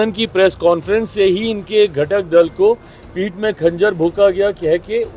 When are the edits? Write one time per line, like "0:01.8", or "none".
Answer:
none